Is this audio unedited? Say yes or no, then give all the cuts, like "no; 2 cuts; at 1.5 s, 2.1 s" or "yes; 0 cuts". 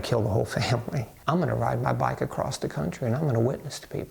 no; 1 cut; at 1.2 s